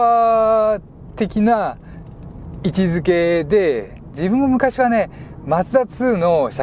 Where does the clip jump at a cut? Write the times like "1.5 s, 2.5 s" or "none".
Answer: none